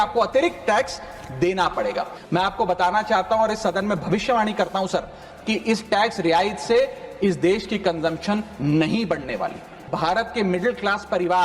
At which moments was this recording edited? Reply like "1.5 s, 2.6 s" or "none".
2.2 s, 9.9 s